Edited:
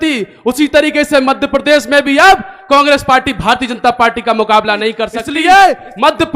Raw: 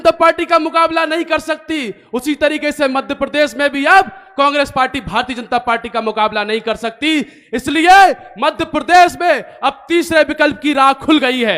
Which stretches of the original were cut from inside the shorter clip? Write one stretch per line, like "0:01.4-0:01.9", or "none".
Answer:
0:06.9-0:07.6